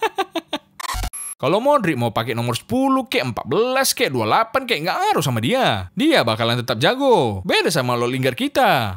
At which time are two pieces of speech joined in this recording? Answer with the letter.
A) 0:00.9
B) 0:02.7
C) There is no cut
A